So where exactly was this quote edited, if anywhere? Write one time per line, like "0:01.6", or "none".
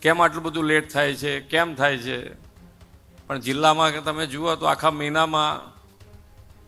none